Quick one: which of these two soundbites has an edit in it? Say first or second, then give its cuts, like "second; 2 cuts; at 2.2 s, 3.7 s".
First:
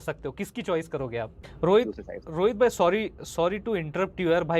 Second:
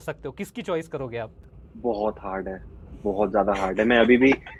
first; 1 cut; at 1.4 s